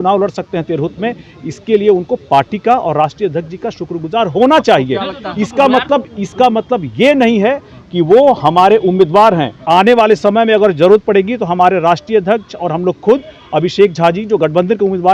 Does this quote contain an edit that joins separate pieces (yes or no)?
yes